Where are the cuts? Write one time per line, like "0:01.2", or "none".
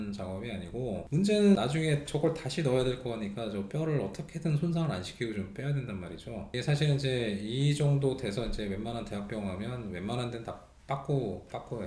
0:01.0
0:06.5